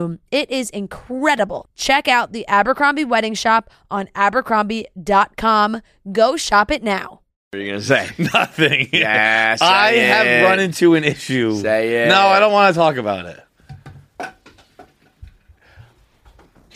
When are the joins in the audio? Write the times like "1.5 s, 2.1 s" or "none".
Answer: 7.4 s